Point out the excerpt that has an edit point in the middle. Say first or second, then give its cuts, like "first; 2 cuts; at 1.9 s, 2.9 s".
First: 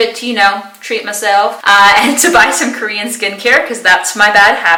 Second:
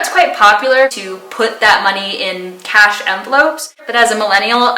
second; 2 cuts; at 0.9 s, 3.8 s